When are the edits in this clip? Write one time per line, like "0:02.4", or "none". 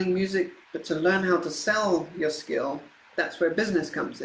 none